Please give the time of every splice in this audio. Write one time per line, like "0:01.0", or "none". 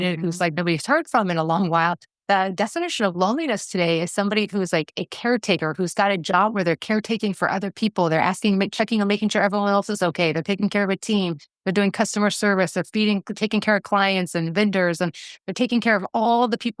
none